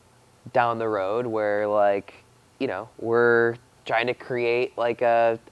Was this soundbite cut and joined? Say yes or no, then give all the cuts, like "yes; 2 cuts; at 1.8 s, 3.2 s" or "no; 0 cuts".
no; 0 cuts